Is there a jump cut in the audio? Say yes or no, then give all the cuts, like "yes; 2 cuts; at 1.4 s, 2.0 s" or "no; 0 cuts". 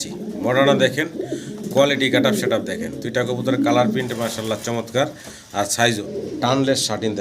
yes; 1 cut; at 6.0 s